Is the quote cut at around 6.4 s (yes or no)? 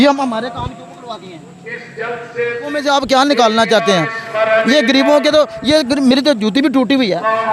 no